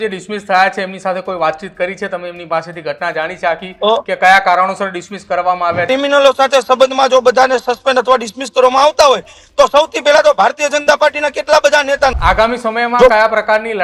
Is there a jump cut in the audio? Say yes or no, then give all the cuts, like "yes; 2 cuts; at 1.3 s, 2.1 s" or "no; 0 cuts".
yes; 2 cuts; at 5.9 s, 12.2 s